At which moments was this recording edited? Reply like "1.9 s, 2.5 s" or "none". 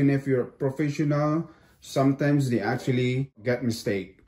3.4 s